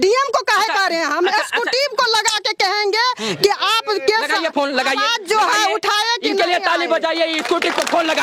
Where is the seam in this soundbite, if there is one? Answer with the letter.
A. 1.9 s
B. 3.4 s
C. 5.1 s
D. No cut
D